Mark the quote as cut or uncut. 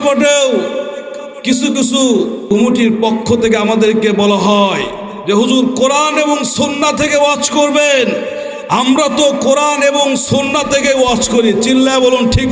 cut